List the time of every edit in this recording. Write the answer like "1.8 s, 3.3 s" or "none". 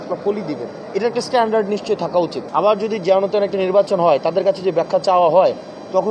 2.4 s